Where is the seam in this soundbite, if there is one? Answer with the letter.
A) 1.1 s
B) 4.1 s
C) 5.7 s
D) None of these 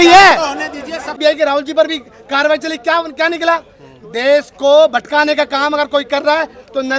A